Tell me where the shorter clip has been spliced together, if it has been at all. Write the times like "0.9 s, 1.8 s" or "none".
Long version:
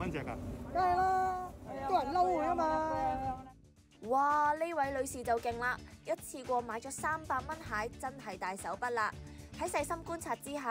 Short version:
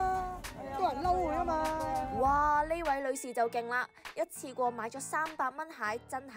2.1 s